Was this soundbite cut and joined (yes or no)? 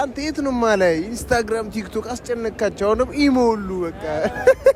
no